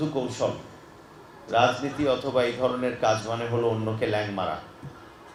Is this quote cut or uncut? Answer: uncut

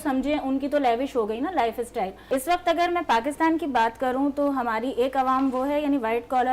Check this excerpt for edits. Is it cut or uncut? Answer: cut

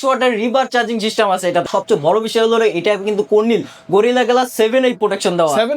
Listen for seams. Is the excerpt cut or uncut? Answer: cut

